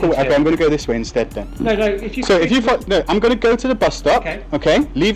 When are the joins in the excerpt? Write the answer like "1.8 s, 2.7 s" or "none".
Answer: none

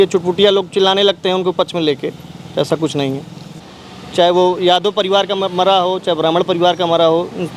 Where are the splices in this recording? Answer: 3.6 s

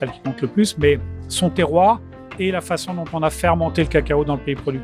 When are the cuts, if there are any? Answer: none

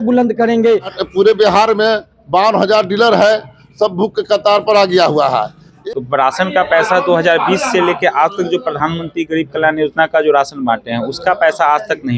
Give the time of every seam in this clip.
1.0 s, 5.6 s

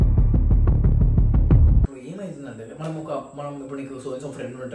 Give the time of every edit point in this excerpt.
1.9 s

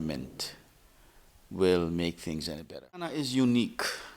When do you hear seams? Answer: 3.2 s

